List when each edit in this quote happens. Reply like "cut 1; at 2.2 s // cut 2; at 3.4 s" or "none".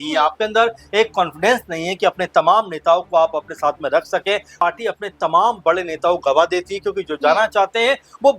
cut 1; at 4.5 s

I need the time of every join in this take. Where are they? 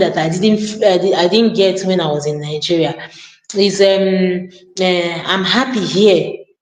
none

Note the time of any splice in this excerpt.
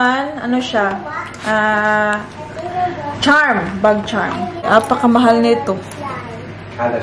cut 1; at 4.6 s

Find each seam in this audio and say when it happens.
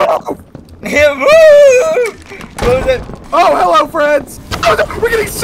cut 1; at 3.2 s // cut 2; at 4.5 s

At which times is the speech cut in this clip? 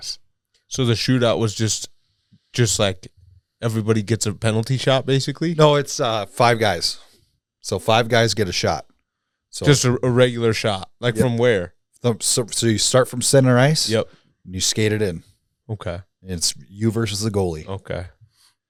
none

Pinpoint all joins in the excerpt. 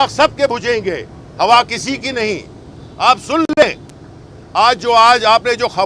none

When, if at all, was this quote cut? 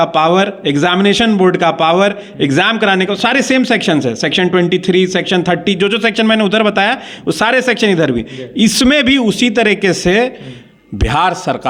none

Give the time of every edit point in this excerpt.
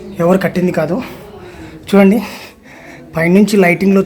none

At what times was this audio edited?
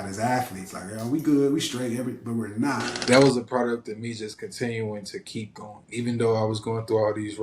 cut 1; at 2.9 s // cut 2; at 5.8 s

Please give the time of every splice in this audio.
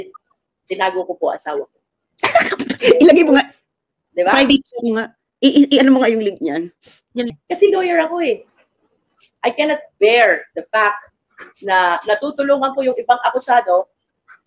cut 1; at 7.3 s

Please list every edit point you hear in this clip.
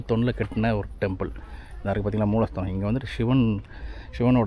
none

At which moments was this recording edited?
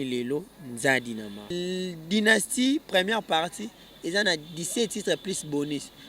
cut 1; at 1.5 s

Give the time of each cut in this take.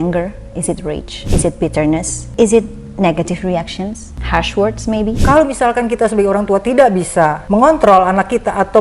cut 1; at 5.2 s

